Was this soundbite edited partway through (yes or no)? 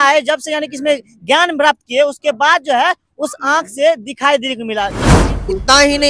yes